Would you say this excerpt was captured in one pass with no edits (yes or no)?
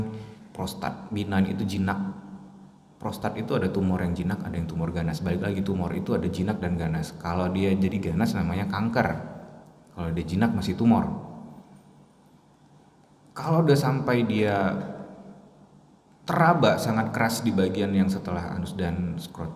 yes